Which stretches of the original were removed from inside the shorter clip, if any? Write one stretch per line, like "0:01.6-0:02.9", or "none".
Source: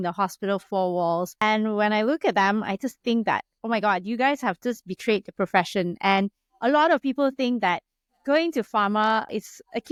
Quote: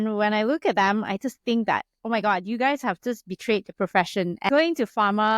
0:06.0-0:08.2